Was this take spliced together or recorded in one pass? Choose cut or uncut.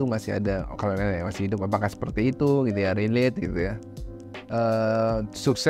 uncut